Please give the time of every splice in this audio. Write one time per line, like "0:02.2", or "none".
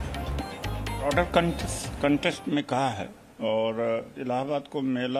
0:01.1